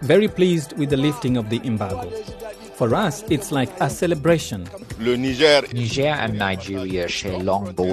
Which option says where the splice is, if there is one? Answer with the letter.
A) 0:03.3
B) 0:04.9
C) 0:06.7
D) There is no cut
B